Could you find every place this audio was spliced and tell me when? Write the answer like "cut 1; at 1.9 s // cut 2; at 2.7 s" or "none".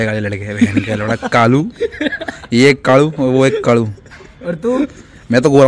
none